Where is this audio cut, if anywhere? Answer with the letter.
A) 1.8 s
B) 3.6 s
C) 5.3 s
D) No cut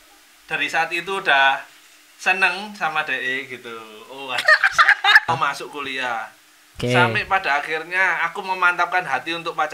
C